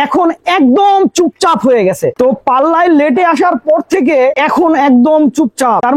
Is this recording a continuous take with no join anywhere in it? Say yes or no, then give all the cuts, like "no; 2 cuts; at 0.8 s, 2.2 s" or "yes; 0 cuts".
yes; 0 cuts